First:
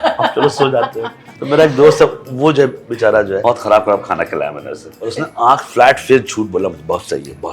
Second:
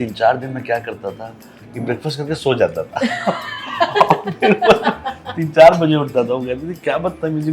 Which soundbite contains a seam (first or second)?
first